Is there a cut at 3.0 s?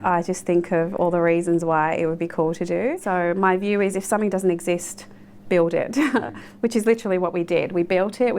yes; 1 cut; at 3.0 s

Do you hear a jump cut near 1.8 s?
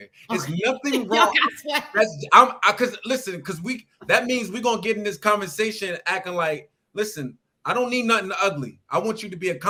no; 0 cuts

